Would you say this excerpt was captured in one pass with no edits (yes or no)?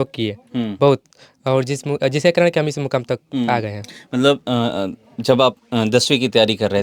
yes